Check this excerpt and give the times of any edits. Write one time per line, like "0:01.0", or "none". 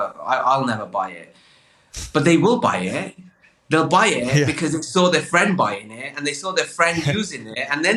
none